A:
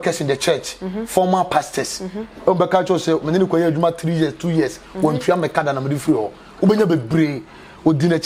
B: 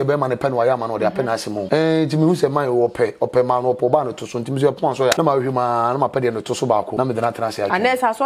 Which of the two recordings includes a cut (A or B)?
B